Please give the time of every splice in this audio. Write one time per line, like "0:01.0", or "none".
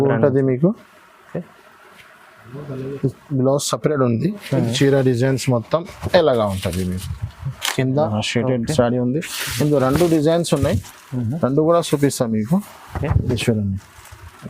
0:08.1